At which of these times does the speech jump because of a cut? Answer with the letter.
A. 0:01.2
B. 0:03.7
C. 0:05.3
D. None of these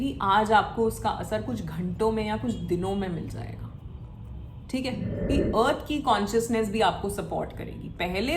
C